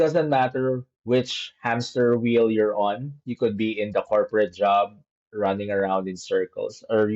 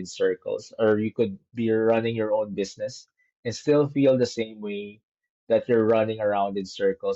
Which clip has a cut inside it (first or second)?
first